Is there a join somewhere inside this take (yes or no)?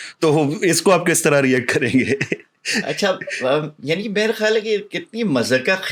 no